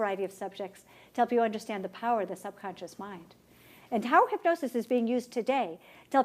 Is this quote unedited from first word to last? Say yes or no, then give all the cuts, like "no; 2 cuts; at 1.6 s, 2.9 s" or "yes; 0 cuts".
no; 1 cut; at 2.3 s